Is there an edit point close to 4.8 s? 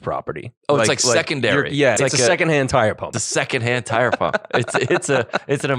no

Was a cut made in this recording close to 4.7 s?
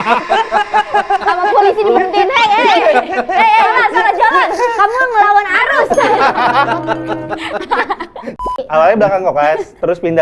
no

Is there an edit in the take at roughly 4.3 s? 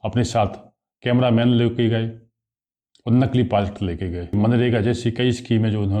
yes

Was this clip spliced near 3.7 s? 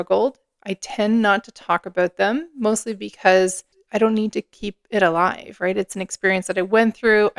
yes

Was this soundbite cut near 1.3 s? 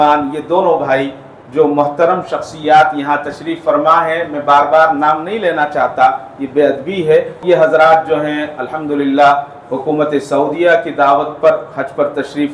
no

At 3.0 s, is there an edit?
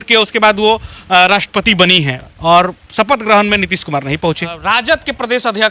no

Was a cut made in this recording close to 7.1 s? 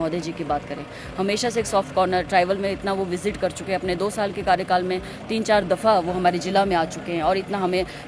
no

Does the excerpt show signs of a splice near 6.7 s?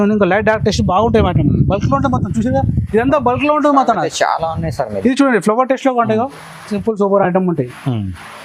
yes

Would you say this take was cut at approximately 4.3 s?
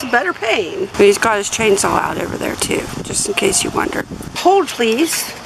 yes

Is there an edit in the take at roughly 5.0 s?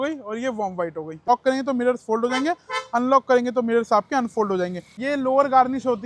yes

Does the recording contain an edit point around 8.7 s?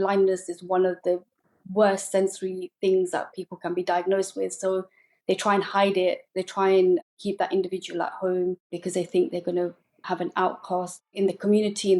no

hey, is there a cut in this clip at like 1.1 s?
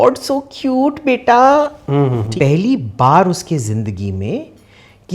no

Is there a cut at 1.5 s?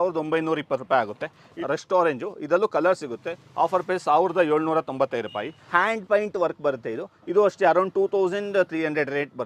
yes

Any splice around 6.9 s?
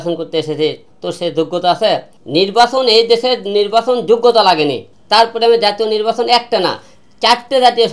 no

